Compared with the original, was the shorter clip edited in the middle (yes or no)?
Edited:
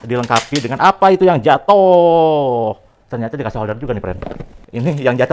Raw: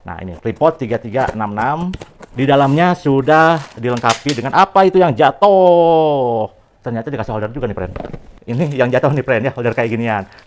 no